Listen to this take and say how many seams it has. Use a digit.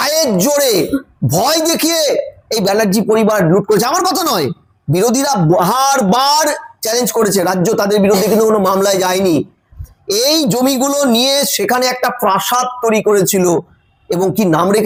0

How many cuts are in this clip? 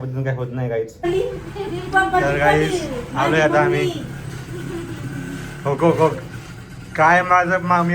1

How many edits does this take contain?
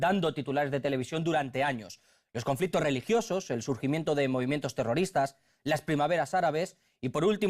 1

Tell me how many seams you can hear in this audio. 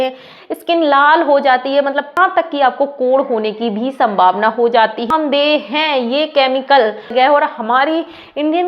3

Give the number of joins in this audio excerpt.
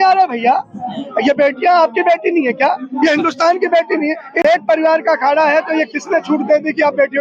1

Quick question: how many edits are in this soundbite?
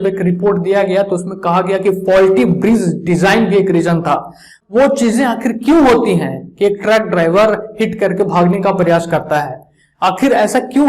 1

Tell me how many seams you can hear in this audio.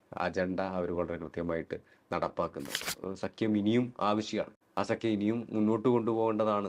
2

